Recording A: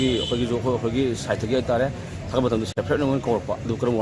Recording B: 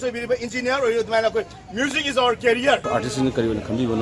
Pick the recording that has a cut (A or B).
B